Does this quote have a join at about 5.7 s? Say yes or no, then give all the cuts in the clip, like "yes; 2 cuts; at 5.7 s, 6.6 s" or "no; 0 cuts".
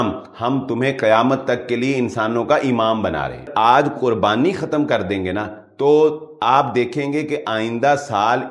no; 1 cut; at 3.5 s